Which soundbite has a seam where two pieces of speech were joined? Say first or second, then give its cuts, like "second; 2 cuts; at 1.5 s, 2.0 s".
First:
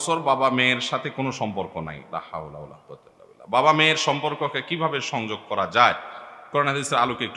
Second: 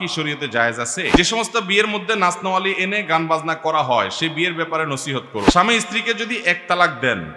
second; 2 cuts; at 1.1 s, 5.5 s